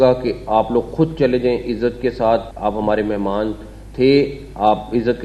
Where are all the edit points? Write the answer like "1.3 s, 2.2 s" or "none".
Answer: 2.5 s